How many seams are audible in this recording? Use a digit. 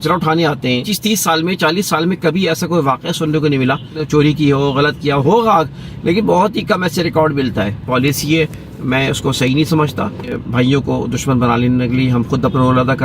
4